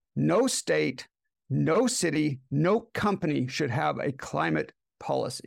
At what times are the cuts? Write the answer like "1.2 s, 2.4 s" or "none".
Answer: none